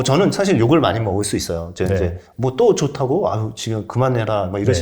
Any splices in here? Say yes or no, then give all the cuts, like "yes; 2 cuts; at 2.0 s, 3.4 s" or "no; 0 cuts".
no; 0 cuts